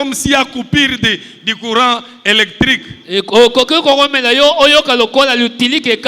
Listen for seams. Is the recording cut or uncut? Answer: uncut